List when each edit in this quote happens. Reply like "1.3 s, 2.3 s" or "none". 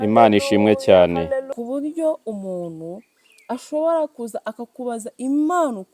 1.5 s